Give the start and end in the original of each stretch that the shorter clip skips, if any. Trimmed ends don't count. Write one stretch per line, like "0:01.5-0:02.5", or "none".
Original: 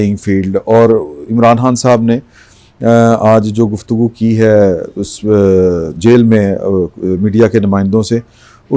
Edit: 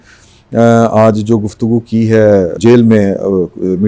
0:04.8-0:05.9